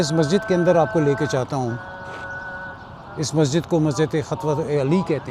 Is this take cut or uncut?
uncut